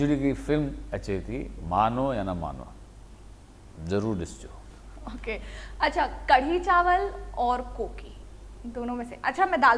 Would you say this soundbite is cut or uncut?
uncut